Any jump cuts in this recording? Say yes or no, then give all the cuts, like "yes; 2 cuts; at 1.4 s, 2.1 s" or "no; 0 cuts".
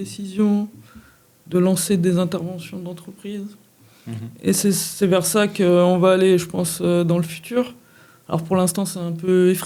no; 0 cuts